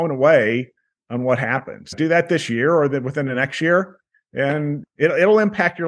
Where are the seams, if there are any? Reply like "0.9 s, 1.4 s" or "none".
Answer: 1.9 s, 4.8 s